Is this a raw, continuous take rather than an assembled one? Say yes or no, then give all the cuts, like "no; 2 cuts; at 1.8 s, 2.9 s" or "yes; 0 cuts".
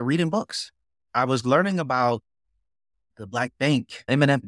no; 1 cut; at 3.1 s